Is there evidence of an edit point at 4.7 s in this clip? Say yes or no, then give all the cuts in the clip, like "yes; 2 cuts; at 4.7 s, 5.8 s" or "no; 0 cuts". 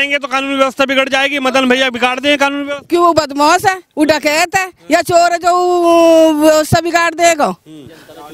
no; 0 cuts